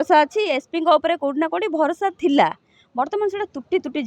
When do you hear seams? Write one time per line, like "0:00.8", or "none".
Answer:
none